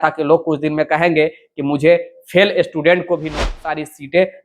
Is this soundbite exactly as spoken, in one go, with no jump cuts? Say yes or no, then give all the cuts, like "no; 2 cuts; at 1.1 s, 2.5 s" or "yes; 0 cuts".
no; 1 cut; at 3.4 s